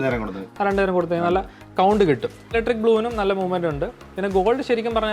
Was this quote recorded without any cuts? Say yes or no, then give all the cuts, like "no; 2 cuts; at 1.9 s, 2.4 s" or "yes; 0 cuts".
no; 1 cut; at 2.5 s